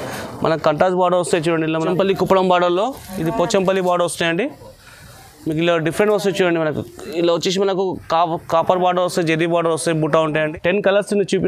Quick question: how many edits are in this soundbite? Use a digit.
2